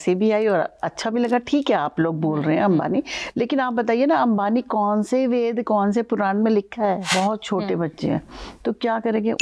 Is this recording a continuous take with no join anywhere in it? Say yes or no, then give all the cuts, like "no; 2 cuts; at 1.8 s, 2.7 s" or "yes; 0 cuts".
no; 1 cut; at 7.1 s